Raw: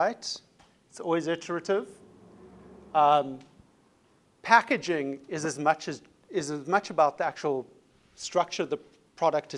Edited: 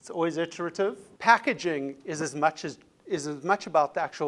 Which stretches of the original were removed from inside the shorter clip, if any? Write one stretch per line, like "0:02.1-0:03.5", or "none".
0:02.0-0:04.3